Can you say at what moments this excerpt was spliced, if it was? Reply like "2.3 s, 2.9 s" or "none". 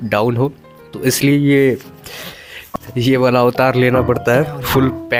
none

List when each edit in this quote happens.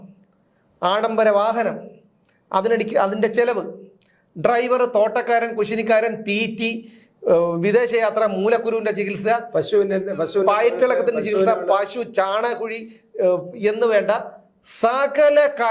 none

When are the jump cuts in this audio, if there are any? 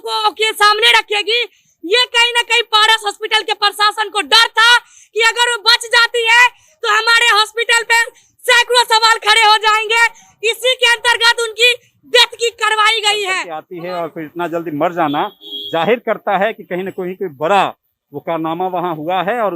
13.7 s

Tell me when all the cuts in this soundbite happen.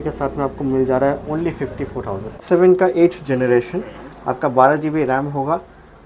2.4 s

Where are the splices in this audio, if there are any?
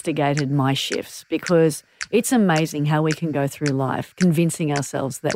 none

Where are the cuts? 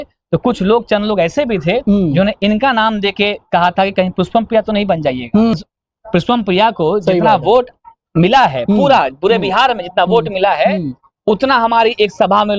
5.5 s

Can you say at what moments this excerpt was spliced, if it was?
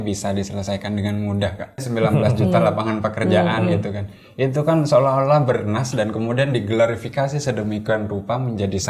1.9 s

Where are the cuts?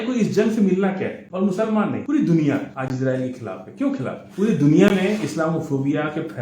1.2 s, 2.0 s, 2.7 s, 4.2 s

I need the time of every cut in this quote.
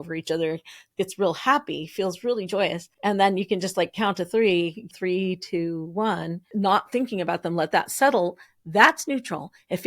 2.9 s, 4.9 s, 6.4 s

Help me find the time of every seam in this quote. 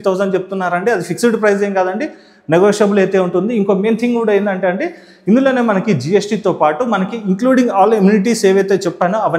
none

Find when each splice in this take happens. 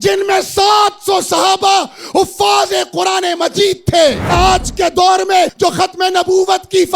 4.3 s, 5.5 s

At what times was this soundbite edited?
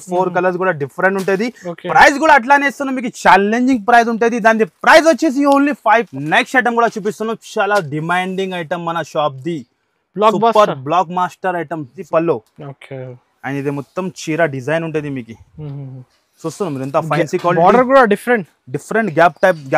6.1 s, 12.0 s

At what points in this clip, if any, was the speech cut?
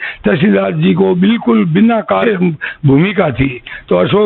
2.2 s

